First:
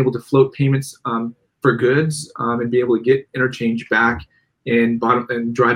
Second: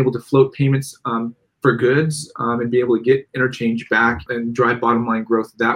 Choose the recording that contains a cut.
second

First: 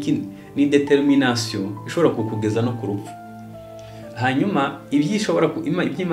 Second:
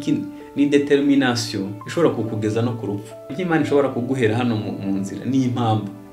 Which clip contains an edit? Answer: second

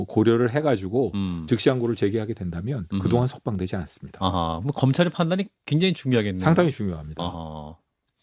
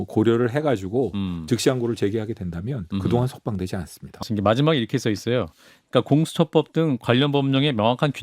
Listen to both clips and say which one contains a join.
second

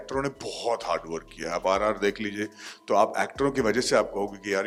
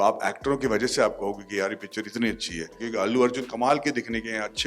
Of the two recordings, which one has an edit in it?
second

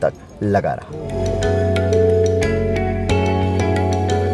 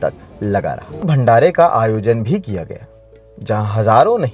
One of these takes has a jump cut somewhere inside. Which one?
second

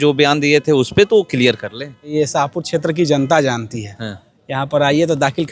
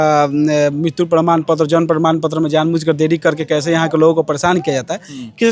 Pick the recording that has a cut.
first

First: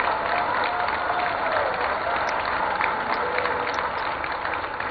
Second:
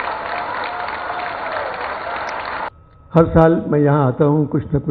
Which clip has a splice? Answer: second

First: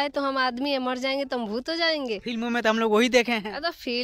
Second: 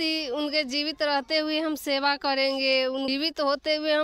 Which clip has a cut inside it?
second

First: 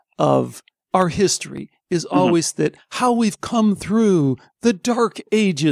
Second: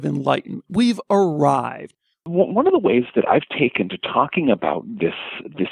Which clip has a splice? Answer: second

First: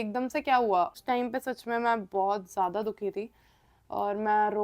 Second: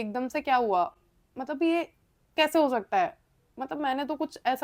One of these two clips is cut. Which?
first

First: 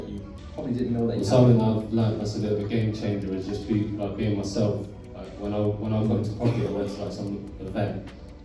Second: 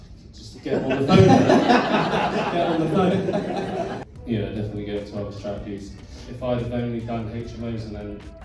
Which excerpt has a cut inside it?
second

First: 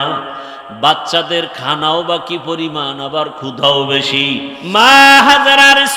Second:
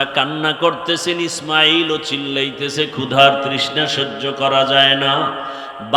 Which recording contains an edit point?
first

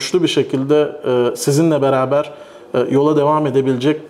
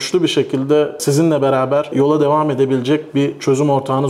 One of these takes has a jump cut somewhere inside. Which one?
second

